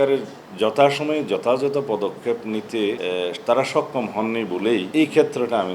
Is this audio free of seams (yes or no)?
no